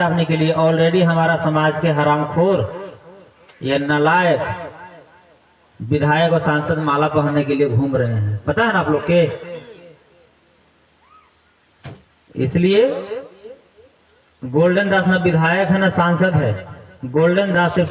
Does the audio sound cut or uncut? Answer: uncut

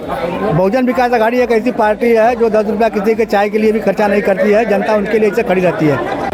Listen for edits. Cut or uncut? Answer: uncut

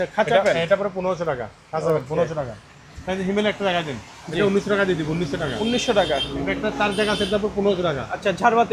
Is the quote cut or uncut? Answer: uncut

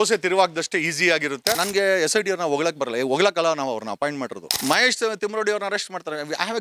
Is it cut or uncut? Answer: cut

